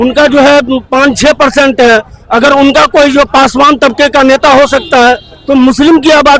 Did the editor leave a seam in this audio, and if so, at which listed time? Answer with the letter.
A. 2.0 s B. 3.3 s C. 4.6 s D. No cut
D